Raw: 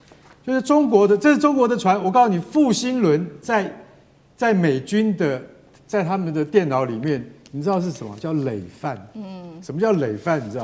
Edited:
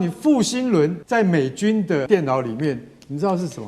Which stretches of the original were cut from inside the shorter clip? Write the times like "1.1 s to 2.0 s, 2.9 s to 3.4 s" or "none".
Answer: 3.3 s to 4.3 s, 5.4 s to 6.5 s